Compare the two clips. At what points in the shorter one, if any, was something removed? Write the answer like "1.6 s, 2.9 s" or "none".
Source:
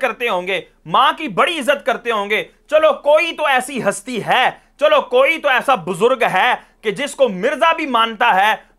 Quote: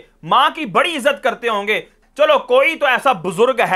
2.0 s

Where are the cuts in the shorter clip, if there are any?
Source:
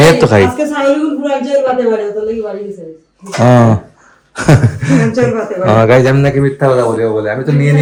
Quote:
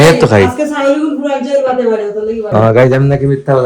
2.5 s

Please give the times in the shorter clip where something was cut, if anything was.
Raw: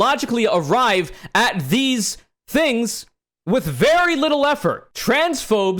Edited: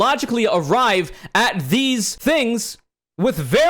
2.1 s

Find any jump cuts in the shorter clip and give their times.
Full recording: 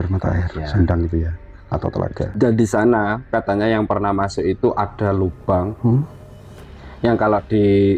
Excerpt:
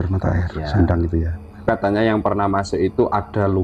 1.6 s

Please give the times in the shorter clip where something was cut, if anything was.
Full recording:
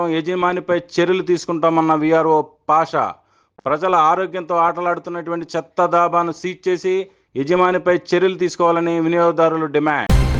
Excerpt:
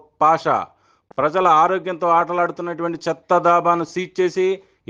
none

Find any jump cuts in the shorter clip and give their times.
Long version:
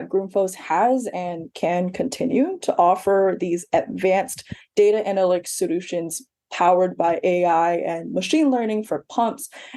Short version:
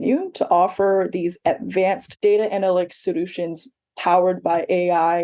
2.1 s

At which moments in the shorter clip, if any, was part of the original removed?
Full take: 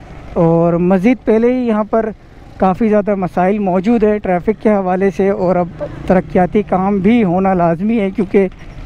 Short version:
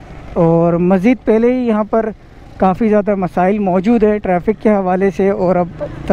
none

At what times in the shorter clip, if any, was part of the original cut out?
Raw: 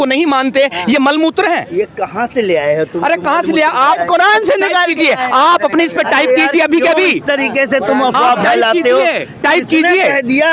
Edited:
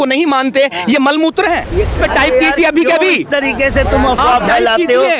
1.9 s

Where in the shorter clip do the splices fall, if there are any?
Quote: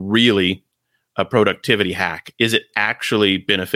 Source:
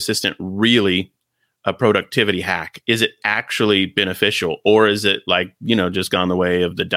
none

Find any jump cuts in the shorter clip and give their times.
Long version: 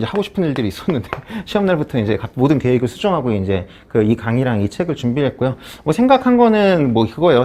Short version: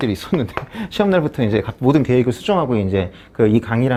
none

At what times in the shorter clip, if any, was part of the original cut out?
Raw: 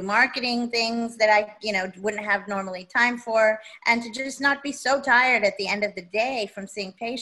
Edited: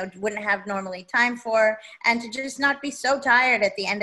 none

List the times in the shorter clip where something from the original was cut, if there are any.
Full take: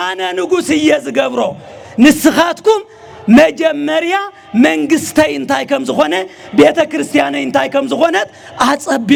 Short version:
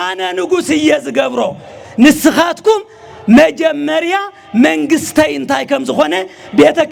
none

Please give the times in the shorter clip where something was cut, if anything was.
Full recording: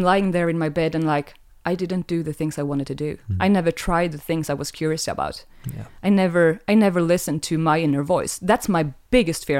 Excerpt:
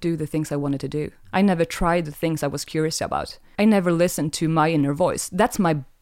3.5 s

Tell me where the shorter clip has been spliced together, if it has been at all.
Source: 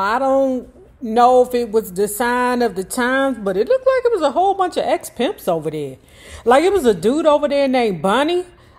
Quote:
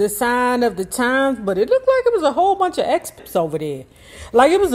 3.2 s

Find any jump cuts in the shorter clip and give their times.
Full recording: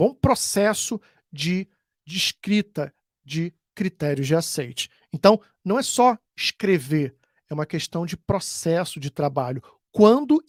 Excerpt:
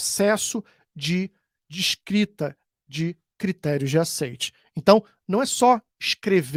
none

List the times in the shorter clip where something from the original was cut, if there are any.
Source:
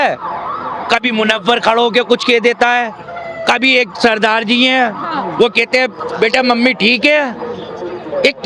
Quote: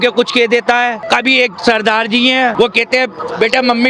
1.0 s, 2.5 s

